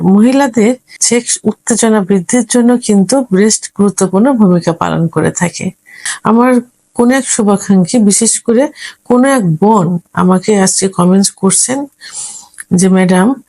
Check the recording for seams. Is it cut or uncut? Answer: cut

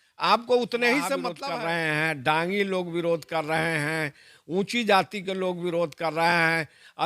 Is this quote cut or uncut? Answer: cut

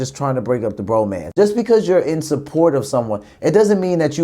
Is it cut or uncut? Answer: cut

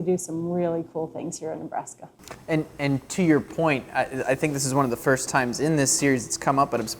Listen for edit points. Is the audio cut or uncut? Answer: uncut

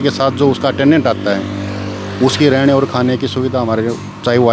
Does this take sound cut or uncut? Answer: uncut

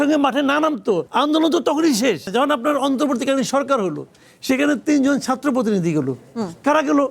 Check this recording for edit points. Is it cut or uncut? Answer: cut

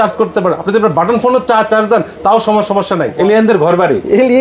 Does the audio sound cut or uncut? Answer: cut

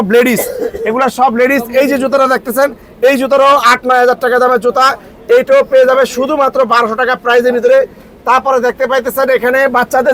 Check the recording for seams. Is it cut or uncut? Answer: uncut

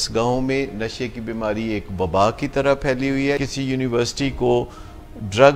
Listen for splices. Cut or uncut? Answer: cut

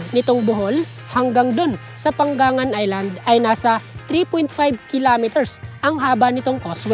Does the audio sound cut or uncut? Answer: uncut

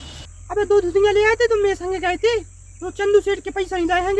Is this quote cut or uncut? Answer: uncut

